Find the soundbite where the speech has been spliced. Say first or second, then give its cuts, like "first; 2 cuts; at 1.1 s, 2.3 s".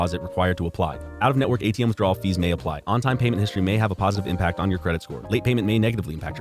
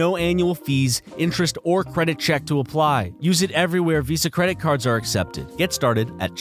second; 1 cut; at 5.4 s